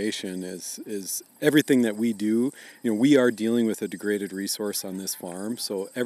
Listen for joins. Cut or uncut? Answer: uncut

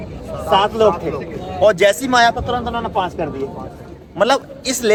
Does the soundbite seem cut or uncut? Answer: uncut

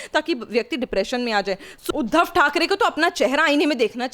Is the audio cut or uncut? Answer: cut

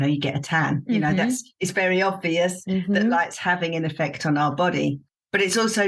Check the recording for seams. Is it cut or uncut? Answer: uncut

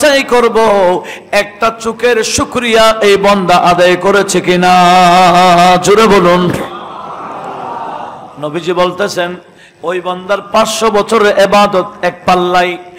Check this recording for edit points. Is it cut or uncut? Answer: uncut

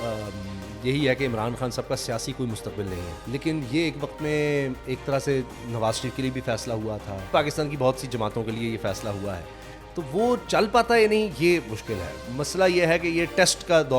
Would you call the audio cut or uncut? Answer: cut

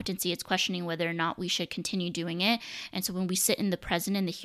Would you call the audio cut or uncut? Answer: uncut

